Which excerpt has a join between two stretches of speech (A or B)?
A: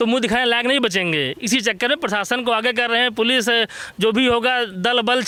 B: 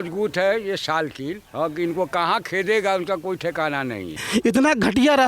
B